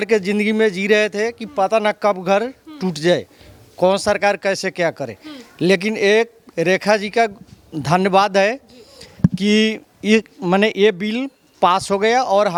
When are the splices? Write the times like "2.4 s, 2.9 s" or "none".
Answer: none